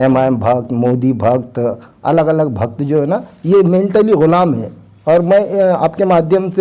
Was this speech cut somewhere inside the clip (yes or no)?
no